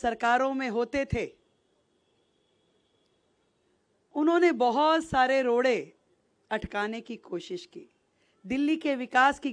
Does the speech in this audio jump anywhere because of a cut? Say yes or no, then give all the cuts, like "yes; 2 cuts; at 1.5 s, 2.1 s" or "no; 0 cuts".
no; 0 cuts